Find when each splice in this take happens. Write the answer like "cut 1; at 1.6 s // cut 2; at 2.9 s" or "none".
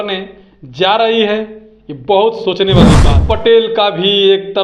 cut 1; at 3.1 s